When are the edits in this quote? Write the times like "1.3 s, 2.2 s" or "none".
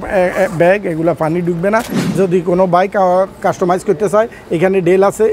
2.0 s